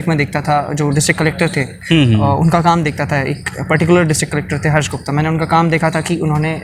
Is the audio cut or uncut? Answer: uncut